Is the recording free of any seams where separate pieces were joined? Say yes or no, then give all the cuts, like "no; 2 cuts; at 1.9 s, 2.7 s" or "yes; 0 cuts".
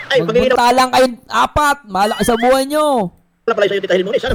yes; 0 cuts